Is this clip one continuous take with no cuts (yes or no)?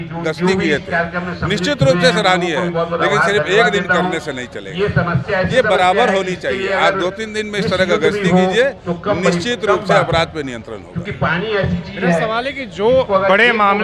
yes